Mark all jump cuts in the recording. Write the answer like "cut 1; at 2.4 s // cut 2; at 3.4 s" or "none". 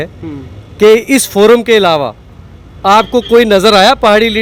none